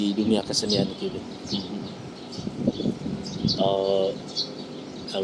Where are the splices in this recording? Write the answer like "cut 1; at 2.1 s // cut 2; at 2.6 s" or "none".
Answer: none